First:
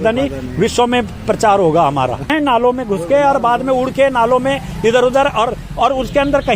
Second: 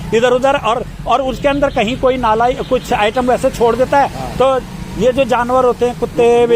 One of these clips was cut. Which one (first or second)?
first